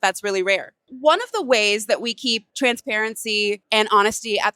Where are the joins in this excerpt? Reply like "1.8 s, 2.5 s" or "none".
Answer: 0.9 s, 2.5 s, 3.6 s